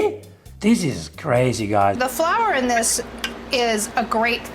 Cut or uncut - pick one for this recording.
cut